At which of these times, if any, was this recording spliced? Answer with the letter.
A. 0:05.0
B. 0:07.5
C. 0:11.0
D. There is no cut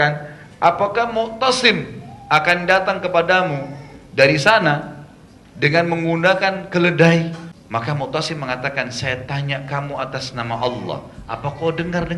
B